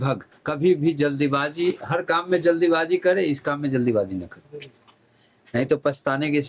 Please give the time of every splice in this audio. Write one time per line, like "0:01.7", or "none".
none